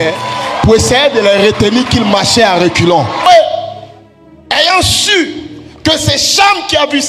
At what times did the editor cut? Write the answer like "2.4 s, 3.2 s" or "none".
3.2 s